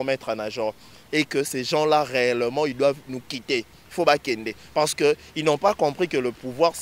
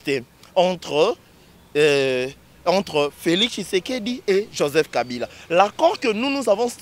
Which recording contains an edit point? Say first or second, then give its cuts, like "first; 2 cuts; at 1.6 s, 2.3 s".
first; 1 cut; at 1.0 s